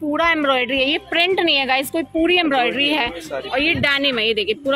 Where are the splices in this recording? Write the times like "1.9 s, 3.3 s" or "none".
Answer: none